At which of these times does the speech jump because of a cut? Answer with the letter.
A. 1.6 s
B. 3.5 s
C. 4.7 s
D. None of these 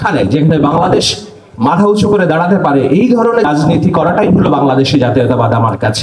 B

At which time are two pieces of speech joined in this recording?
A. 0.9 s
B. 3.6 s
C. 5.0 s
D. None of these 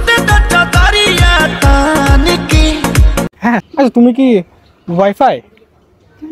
B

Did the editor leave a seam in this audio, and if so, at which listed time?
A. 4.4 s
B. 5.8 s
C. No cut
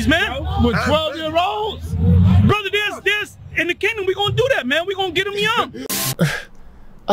B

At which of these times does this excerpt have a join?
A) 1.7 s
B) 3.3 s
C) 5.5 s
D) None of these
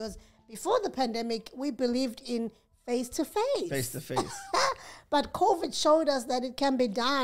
D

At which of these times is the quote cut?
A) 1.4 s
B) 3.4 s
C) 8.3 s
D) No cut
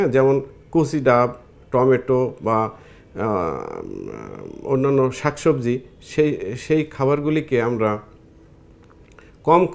D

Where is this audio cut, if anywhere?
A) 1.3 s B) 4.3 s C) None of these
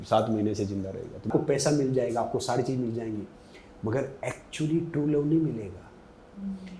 A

